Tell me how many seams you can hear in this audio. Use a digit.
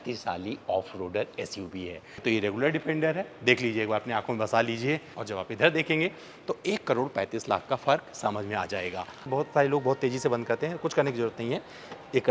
3